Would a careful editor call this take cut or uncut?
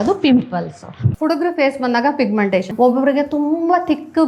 cut